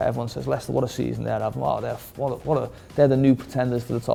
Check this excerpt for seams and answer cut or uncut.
uncut